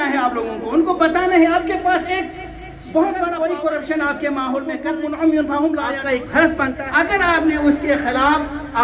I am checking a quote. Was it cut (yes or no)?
yes